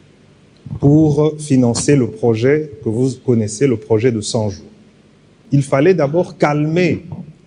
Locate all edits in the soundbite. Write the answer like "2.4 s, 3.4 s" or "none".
5.4 s